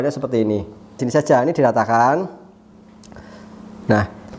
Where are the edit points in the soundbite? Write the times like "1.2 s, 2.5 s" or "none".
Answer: 1.0 s